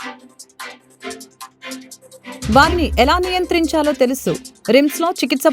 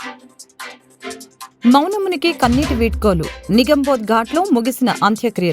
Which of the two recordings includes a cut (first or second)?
first